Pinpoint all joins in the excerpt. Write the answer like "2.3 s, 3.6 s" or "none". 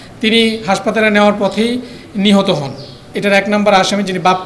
3.0 s